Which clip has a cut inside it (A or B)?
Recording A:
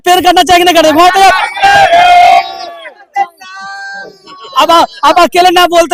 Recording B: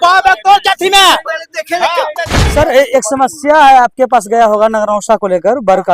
B